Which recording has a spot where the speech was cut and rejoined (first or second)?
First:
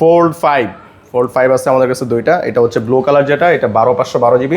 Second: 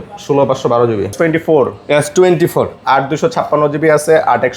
second